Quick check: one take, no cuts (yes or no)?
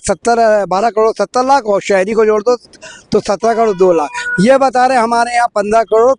yes